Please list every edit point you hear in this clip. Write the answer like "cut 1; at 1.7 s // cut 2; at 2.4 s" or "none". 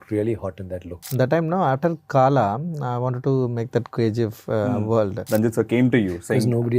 cut 1; at 1.0 s // cut 2; at 5.2 s